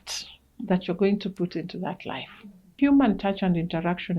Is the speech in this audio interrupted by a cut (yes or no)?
yes